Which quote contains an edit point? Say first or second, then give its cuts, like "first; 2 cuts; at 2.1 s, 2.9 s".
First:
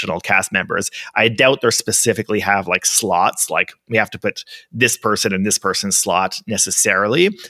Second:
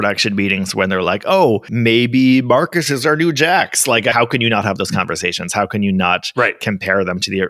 second; 2 cuts; at 1.7 s, 4.1 s